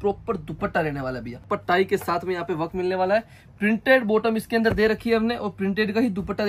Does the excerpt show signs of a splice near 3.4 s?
no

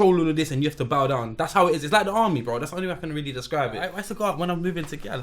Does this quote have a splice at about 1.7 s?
no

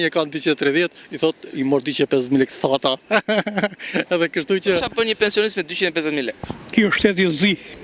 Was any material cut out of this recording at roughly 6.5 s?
yes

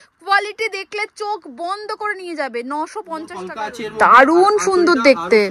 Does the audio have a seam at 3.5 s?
yes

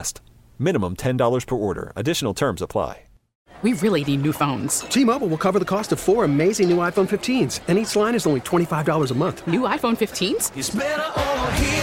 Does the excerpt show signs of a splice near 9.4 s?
no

